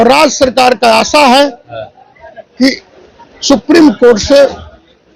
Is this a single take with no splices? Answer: yes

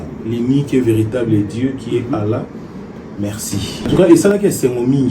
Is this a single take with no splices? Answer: no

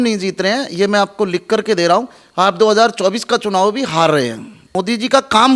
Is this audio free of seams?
no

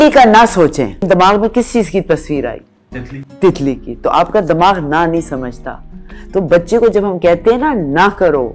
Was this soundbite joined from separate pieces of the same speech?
yes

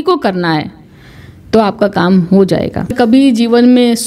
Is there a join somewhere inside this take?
yes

